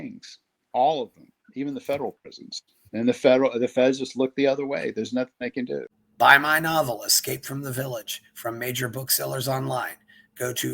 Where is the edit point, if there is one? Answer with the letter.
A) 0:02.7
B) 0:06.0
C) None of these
B